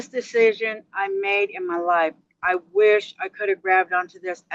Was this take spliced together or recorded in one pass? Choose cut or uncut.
uncut